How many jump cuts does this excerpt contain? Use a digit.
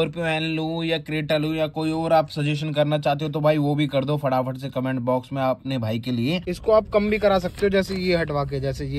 1